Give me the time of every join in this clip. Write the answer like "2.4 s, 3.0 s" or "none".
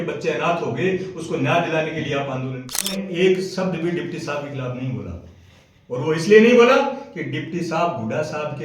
3.0 s